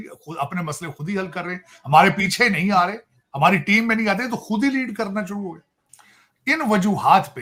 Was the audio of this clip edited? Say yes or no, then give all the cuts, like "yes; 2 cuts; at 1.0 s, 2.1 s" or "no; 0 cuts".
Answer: no; 0 cuts